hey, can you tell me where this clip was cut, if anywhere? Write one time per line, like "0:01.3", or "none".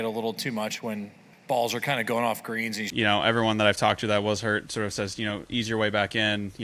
0:02.9

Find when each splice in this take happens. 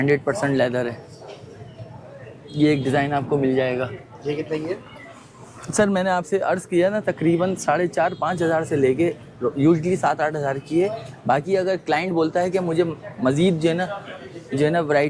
none

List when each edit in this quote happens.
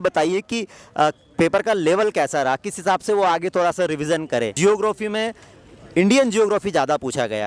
0:04.5

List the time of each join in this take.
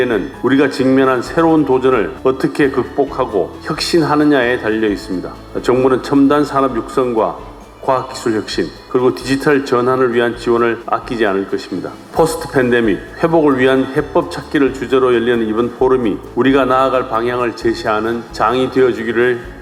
none

